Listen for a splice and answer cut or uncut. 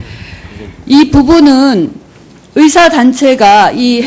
uncut